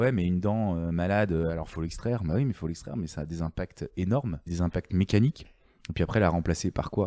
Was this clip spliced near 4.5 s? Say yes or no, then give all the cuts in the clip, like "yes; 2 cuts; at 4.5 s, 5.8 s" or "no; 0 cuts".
yes; 1 cut; at 4.5 s